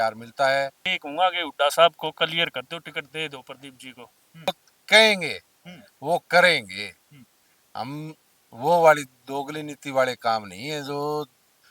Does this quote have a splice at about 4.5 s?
yes; 2 cuts; at 0.9 s, 4.5 s

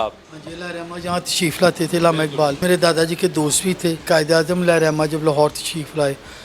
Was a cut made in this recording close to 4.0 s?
yes; 2 cuts; at 2.6 s, 4.0 s

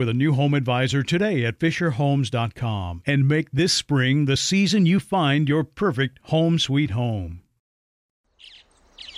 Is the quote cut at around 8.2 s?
yes; 1 cut; at 8.2 s

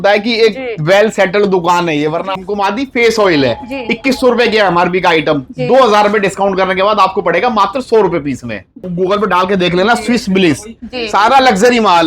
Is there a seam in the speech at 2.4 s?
yes; 2 cuts; at 2.4 s, 8.9 s

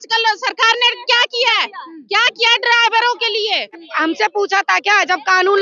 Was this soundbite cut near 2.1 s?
no; 1 cut; at 3.9 s

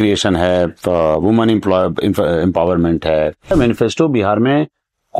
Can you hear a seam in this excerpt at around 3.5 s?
yes; 1 cut; at 3.5 s

